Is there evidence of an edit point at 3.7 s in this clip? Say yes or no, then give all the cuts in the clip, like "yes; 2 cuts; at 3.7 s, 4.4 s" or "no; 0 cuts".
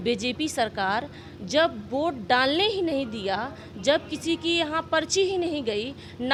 no; 0 cuts